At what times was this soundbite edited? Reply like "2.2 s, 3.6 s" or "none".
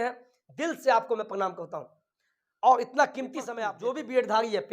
3.6 s